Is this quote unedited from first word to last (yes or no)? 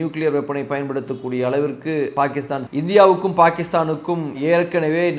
no